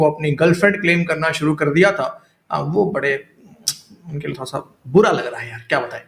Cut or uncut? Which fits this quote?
uncut